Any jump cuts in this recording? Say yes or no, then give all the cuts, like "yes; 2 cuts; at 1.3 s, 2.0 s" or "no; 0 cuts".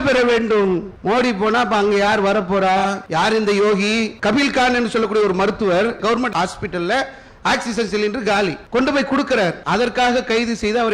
yes; 4 cuts; at 0.9 s, 3.0 s, 8.6 s, 9.6 s